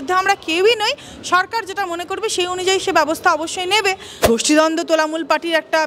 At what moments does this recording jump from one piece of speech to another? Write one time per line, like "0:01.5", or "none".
0:04.2

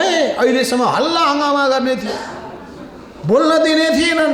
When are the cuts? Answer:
none

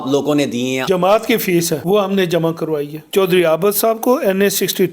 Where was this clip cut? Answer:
0:00.8
0:01.8
0:03.1

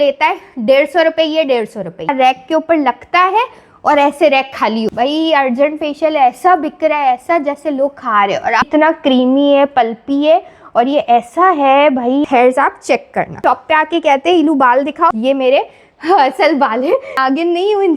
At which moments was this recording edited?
0:02.1
0:04.9
0:08.6
0:12.2
0:13.4
0:15.1
0:17.1

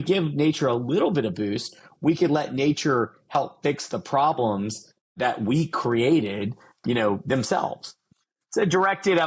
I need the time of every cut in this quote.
0:05.1
0:06.8
0:08.1

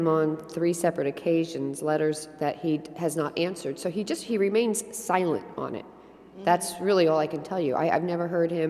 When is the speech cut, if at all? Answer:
none

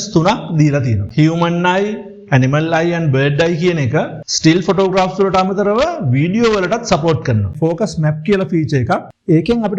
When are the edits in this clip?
0:01.0
0:07.5

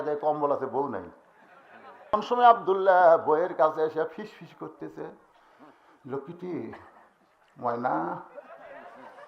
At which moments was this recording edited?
0:02.2

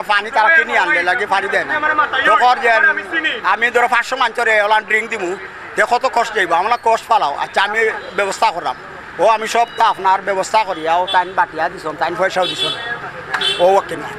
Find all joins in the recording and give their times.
none

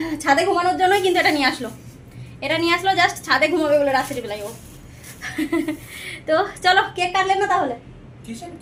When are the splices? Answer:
none

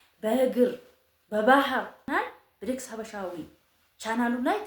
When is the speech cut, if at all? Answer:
0:02.1

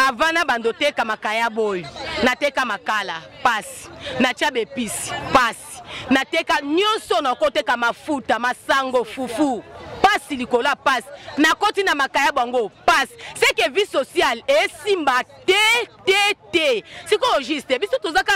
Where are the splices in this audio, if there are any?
none

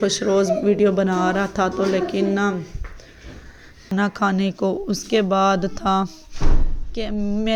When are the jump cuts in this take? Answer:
0:03.9

